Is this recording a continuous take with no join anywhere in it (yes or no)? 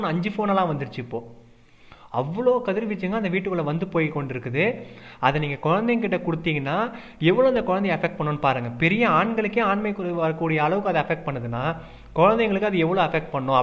yes